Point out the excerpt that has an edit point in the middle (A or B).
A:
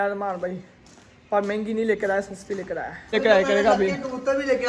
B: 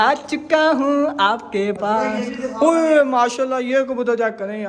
A